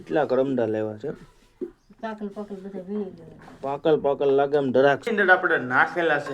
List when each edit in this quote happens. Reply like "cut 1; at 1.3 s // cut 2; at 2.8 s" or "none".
cut 1; at 5.1 s